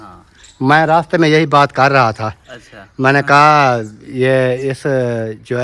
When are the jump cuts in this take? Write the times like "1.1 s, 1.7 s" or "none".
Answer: none